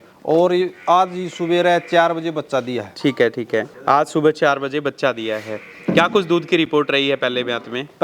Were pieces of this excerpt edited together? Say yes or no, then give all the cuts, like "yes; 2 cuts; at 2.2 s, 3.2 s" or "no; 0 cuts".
yes; 1 cut; at 3.7 s